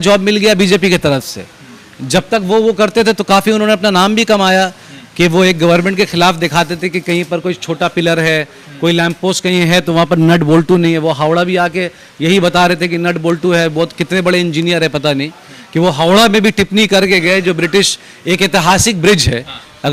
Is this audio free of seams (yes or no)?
yes